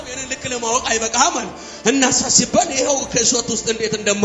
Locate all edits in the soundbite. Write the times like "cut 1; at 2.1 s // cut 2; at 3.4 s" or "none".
none